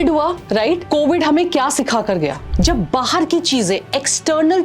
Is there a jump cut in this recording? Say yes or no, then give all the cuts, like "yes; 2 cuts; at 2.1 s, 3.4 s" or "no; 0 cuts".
yes; 2 cuts; at 0.8 s, 2.4 s